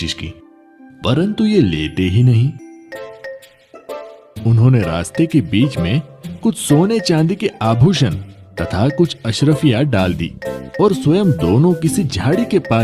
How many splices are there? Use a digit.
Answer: 1